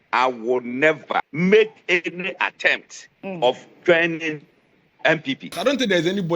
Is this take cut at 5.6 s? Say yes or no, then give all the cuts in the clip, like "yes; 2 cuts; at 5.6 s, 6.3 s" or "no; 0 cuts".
yes; 2 cuts; at 1.3 s, 5.6 s